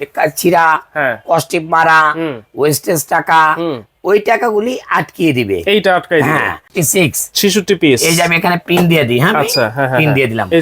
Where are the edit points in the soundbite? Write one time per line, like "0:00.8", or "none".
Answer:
0:06.7